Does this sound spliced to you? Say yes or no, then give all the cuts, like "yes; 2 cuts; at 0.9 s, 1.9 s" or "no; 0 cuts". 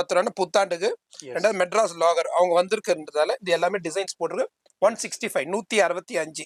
no; 0 cuts